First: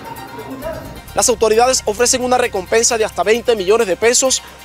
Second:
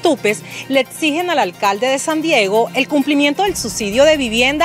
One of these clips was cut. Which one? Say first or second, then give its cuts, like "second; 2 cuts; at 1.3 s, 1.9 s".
first; 1 cut; at 1.0 s